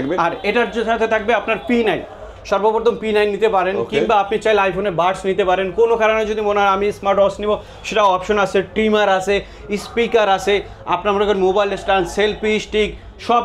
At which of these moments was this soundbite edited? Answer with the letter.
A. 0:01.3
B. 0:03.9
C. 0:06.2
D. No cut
D